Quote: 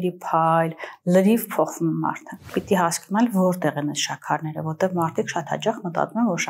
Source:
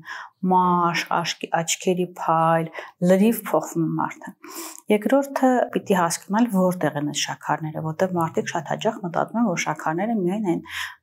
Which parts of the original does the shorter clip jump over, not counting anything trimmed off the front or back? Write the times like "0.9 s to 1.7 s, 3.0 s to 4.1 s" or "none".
4.5 s to 5.8 s

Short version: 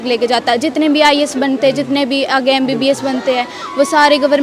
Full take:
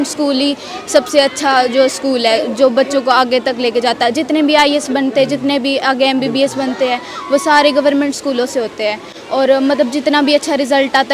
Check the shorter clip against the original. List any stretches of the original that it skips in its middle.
none

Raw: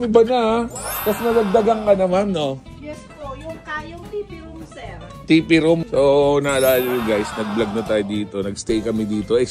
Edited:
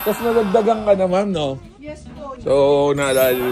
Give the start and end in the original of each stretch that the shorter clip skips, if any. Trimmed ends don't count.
3.4 s to 5.9 s

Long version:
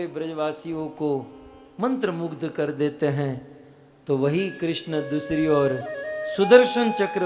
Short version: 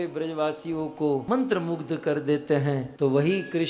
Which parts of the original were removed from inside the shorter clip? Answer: 1.2 s to 1.8 s, 3.4 s to 4.0 s

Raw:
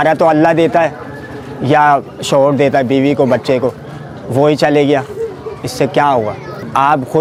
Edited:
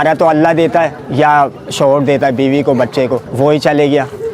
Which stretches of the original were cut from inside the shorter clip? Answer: 1.0 s to 1.5 s, 3.8 s to 4.2 s

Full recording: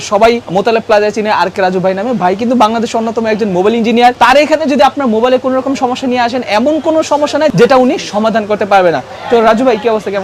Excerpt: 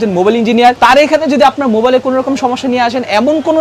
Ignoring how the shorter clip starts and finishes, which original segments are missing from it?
none

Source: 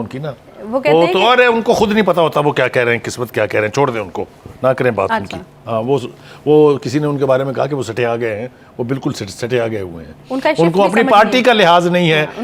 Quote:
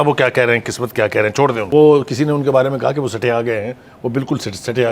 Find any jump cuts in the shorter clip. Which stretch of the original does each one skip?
4.0 s to 6.4 s

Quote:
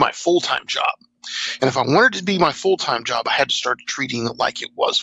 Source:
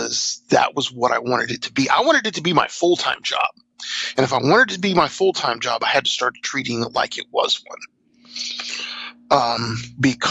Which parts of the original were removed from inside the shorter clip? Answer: none

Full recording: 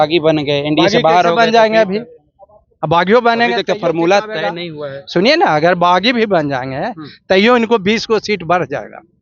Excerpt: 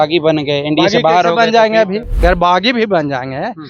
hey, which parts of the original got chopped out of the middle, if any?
2.2 s to 5.6 s

